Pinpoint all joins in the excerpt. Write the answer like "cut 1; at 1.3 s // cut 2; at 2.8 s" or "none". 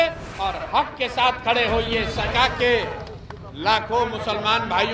cut 1; at 2.3 s